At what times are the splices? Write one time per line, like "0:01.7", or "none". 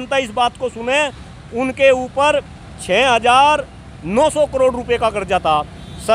none